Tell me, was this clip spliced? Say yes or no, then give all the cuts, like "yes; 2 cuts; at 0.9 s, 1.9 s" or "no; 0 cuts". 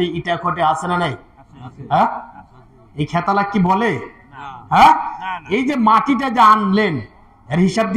no; 0 cuts